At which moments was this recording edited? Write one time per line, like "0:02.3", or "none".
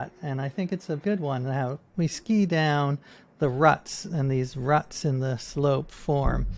0:01.0
0:01.8